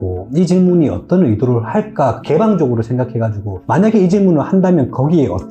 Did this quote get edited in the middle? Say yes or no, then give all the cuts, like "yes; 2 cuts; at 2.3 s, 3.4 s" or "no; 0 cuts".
no; 0 cuts